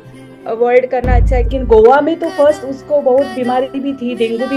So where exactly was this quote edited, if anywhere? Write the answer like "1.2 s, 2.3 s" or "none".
1.5 s